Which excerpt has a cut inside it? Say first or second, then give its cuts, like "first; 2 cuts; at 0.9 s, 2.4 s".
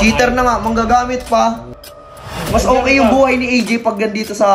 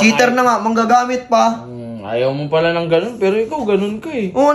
first; 1 cut; at 2.1 s